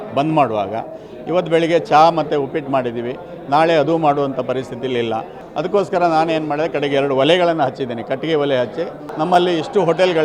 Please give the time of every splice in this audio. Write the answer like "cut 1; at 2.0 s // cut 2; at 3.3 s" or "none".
cut 1; at 5.4 s // cut 2; at 9.0 s